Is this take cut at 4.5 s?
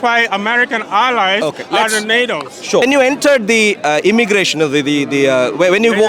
no; 1 cut; at 2.8 s

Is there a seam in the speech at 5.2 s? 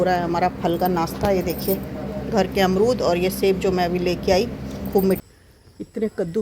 yes; 1 cut; at 5.2 s

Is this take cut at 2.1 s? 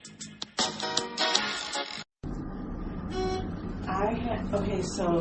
yes; 1 cut; at 2.1 s

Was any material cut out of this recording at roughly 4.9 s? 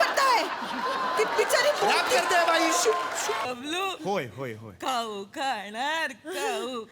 no; 1 cut; at 3.4 s

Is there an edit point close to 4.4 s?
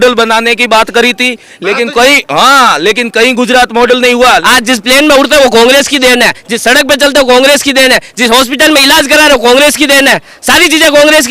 yes; 1 cut; at 4.4 s

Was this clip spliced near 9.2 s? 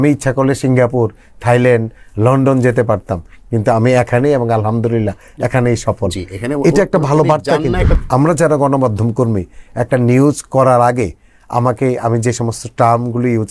no; 1 cut; at 8.0 s

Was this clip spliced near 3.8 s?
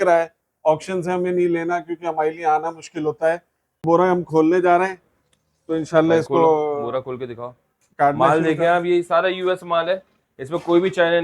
yes; 1 cut; at 3.8 s

